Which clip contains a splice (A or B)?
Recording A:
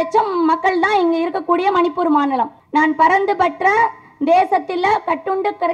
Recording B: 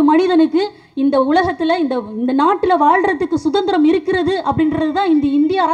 A